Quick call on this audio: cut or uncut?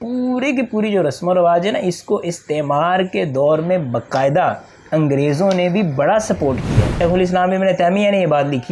cut